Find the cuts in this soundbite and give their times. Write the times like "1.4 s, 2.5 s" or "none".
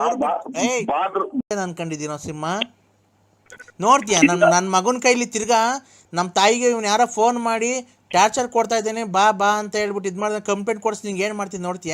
1.4 s